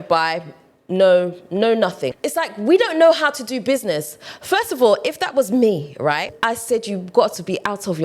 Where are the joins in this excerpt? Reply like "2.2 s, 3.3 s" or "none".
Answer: 2.2 s, 6.3 s